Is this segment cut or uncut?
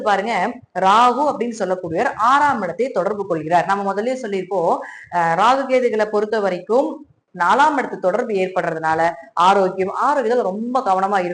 cut